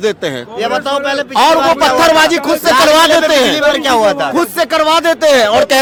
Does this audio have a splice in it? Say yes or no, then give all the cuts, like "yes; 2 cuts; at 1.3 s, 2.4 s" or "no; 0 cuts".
no; 0 cuts